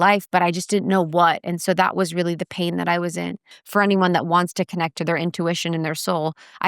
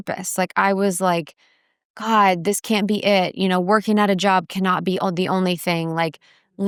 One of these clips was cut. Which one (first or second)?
first